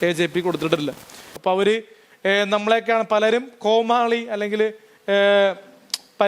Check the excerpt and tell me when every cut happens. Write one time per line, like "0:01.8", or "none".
0:01.3

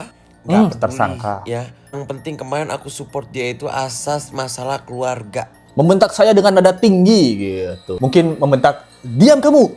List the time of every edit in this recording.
0:05.6

